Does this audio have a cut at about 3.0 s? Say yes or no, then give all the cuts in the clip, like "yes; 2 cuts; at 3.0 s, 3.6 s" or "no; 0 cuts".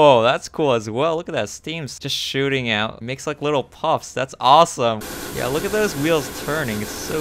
yes; 2 cuts; at 3.0 s, 5.0 s